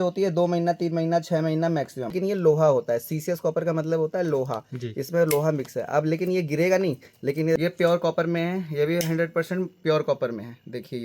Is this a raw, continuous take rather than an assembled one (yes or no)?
no